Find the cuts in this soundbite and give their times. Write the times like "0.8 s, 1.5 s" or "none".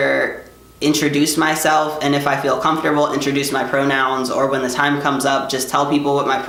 none